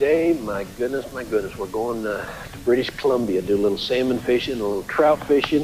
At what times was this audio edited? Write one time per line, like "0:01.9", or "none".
0:01.0